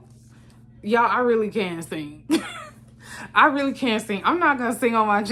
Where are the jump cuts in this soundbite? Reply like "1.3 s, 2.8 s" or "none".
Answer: none